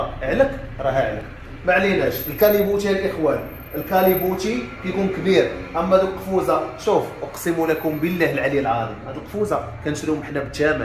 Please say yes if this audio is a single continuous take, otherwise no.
yes